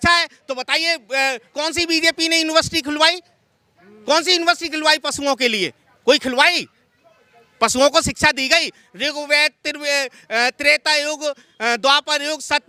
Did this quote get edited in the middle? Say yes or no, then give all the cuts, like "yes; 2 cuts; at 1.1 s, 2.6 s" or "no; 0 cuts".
no; 0 cuts